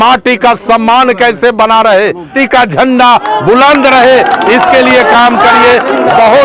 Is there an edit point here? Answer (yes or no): yes